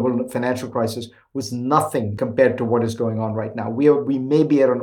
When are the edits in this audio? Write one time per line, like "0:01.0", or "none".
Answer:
0:02.1